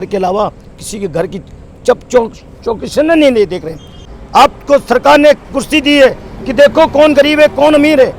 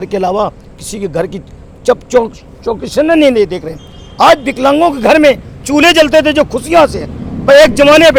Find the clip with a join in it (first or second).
first